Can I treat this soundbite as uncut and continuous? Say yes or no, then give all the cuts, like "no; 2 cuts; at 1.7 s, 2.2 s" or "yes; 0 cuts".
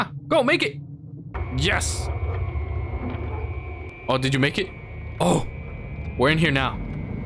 no; 2 cuts; at 1.4 s, 3.9 s